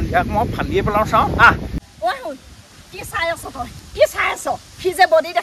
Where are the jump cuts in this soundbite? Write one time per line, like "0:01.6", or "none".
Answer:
0:01.7